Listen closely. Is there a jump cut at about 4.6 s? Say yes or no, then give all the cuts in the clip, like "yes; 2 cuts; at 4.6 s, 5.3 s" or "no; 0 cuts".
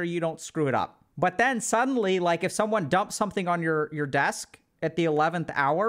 no; 1 cut; at 1.0 s